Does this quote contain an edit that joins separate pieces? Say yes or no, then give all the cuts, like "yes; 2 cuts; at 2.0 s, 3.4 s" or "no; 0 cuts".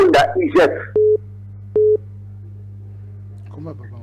no; 0 cuts